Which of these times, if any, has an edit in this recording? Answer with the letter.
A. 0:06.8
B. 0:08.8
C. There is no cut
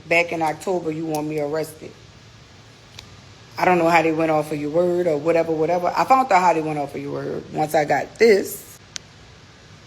B